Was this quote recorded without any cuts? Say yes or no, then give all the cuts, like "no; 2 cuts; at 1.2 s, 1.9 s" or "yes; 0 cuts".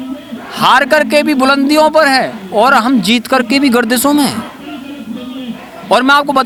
yes; 0 cuts